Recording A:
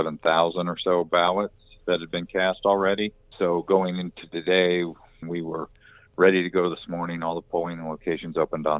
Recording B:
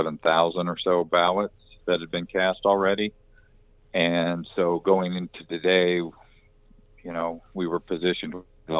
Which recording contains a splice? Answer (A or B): A